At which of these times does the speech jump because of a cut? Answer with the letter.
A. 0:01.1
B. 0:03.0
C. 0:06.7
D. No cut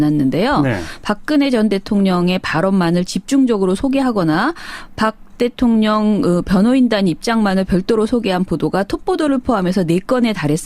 B